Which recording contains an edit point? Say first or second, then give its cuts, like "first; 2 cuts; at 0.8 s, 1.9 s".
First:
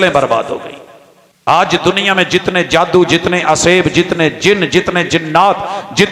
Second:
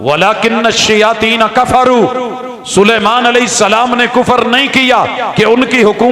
first; 1 cut; at 1.5 s